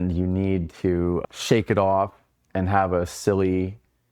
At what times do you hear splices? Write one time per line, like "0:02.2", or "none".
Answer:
0:01.2